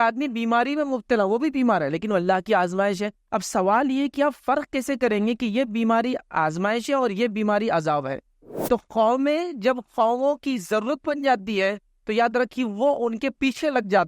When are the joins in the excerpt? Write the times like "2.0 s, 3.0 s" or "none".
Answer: 8.5 s